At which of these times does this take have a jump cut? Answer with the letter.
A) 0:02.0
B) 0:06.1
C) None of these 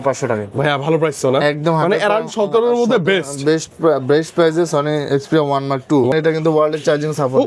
B